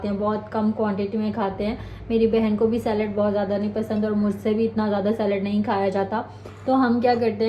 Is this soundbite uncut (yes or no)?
yes